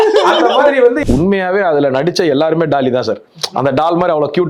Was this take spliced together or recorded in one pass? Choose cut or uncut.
cut